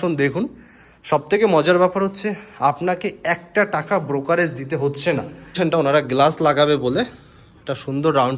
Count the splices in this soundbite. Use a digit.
1